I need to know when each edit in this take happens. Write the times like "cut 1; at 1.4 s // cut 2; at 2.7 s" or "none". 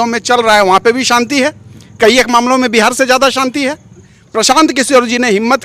cut 1; at 4.2 s